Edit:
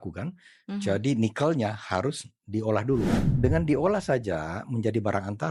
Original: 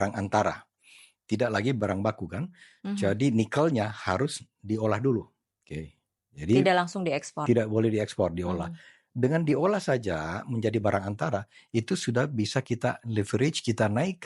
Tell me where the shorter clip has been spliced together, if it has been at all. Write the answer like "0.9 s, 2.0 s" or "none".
3.2 s